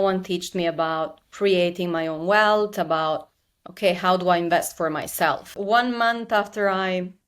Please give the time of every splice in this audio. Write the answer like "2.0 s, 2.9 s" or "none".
5.6 s